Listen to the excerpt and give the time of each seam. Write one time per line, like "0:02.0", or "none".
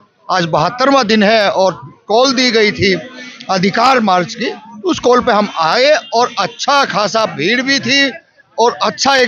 none